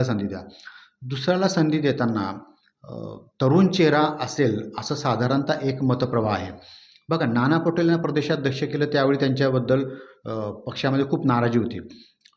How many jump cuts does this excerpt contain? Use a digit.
0